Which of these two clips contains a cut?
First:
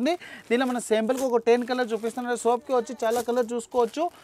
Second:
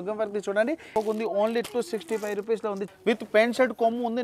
second; 2 cuts; at 0.9 s, 2.9 s

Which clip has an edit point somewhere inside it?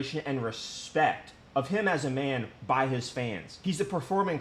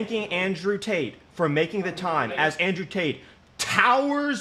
first; 1 cut; at 3.5 s

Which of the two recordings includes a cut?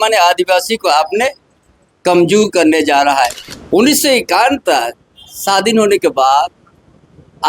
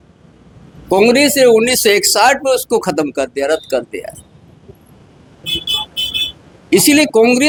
first; 1 cut; at 3.5 s

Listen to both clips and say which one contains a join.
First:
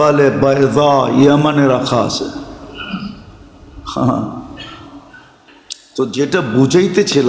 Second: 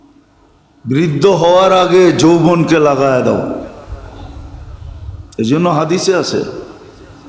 first; 1 cut; at 5.6 s

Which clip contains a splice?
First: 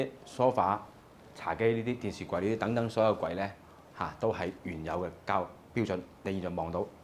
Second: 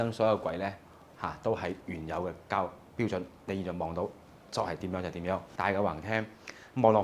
second; 1 cut; at 5.5 s

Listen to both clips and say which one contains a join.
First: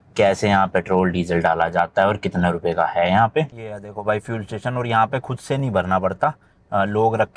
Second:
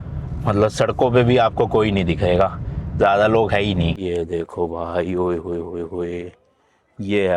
second; 1 cut; at 4.0 s

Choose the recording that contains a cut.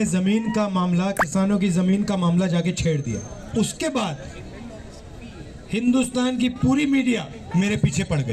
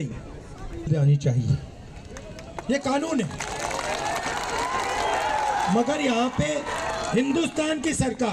first; 2 cuts; at 3.4 s, 7.4 s

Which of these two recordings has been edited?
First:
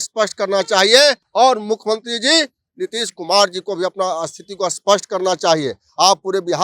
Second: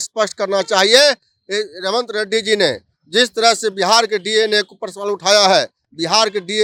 first; 1 cut; at 1.2 s

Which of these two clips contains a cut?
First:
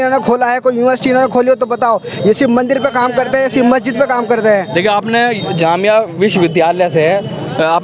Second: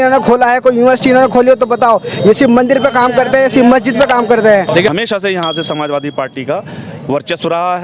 second; 1 cut; at 4.9 s

